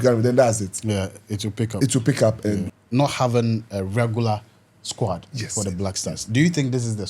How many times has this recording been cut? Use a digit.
1